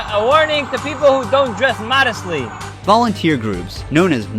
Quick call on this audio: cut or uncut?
cut